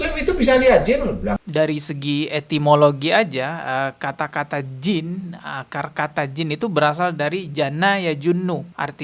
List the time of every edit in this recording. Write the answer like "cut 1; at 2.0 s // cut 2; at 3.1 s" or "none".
cut 1; at 1.4 s